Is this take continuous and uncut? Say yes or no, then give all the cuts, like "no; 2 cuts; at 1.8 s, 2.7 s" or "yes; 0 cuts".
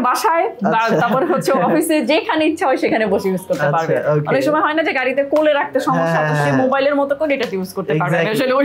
yes; 0 cuts